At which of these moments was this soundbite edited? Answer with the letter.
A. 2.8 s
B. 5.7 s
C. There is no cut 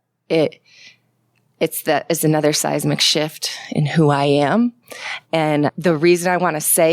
B